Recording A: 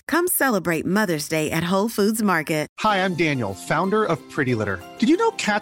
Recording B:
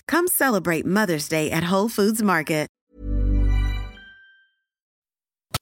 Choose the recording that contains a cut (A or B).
A